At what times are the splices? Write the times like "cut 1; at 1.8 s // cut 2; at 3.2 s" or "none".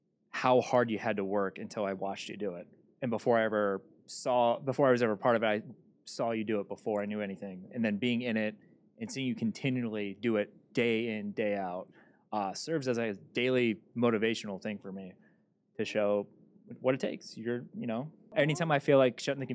cut 1; at 18.3 s